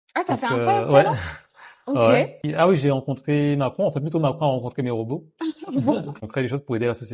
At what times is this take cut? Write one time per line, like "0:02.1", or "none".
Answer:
0:02.4
0:06.2